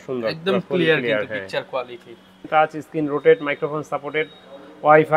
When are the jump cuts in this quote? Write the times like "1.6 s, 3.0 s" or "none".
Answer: 2.3 s